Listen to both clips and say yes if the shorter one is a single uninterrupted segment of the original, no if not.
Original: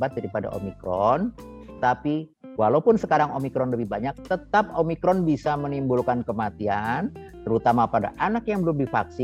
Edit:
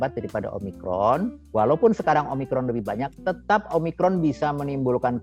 no